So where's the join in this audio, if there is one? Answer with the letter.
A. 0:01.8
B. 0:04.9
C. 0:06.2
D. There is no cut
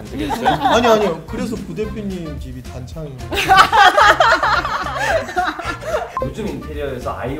C